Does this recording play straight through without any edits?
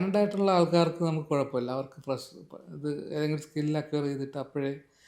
yes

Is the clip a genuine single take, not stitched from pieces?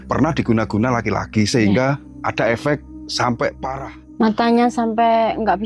no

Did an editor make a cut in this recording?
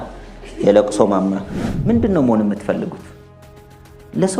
yes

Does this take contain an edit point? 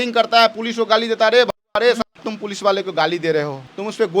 yes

